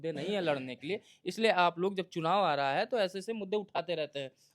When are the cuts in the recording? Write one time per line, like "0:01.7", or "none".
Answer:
none